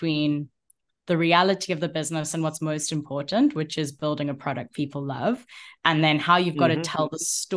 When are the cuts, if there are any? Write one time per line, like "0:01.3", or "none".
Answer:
none